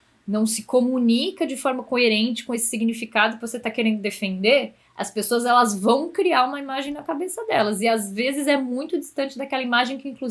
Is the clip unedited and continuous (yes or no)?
yes